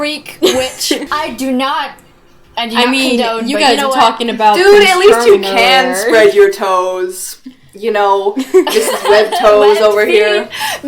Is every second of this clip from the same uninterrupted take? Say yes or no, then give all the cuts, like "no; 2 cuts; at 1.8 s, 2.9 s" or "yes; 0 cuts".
no; 1 cut; at 1.1 s